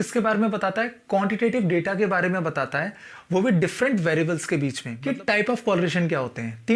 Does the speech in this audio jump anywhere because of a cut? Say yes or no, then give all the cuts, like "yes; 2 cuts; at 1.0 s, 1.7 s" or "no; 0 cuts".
yes; 1 cut; at 4.9 s